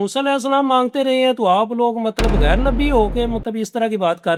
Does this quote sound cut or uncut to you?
uncut